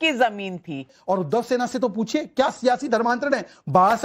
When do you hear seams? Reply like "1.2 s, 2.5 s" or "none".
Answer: 1.0 s